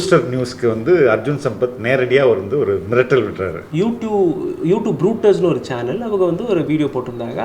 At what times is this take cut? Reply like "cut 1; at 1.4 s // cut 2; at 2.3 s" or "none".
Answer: cut 1; at 3.6 s